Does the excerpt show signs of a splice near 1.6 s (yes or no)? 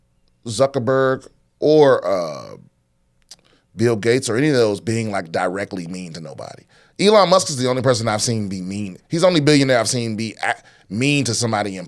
no